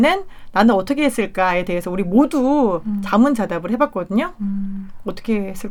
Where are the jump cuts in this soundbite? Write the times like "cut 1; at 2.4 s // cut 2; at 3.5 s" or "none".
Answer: none